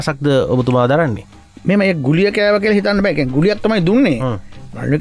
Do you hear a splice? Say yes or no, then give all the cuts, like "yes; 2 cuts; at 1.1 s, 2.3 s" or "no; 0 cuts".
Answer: no; 0 cuts